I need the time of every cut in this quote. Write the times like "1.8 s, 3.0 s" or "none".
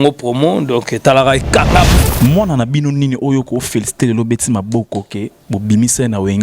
1.9 s